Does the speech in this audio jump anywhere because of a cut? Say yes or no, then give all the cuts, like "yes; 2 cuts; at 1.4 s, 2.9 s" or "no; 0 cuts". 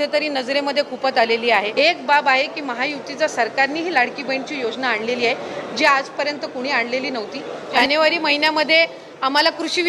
yes; 2 cuts; at 1.7 s, 7.7 s